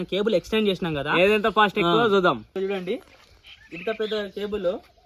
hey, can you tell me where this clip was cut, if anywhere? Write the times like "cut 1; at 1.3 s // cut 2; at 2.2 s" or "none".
cut 1; at 2.5 s